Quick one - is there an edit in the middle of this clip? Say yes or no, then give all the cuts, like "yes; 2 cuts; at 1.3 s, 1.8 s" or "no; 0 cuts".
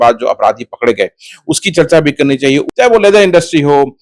yes; 1 cut; at 2.7 s